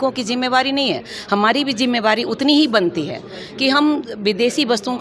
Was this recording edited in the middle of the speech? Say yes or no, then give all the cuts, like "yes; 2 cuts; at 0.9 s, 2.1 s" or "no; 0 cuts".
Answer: no; 0 cuts